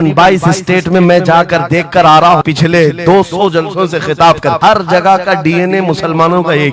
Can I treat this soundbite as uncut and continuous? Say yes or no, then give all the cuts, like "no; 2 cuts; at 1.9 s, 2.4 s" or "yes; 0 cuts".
no; 2 cuts; at 2.4 s, 4.6 s